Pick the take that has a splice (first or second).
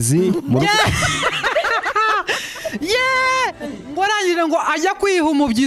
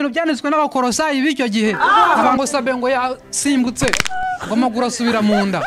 second